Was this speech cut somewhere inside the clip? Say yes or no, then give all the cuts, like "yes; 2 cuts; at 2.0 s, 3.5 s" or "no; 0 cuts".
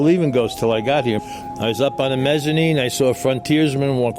yes; 1 cut; at 1.2 s